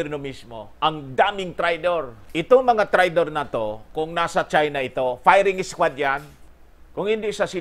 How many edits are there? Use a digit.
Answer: 2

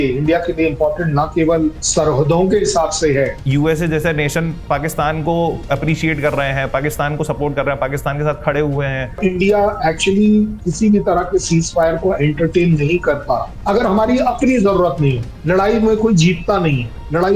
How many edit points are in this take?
3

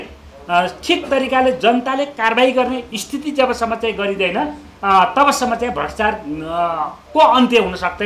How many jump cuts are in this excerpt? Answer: 0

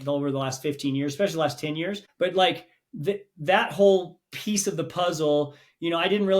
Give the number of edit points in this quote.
1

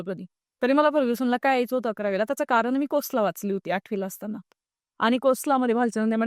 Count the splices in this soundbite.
0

